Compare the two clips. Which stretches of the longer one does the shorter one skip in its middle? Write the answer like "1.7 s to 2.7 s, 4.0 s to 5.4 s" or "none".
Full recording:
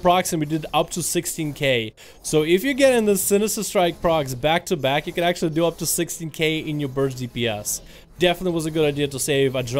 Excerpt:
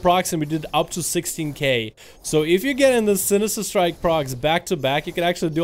none